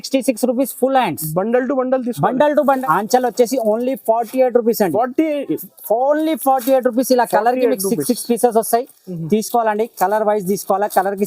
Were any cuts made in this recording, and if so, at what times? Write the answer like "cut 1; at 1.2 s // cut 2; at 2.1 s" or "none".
cut 1; at 2.8 s